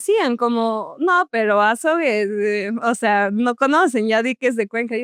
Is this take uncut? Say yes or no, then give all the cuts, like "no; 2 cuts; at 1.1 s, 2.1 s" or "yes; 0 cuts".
yes; 0 cuts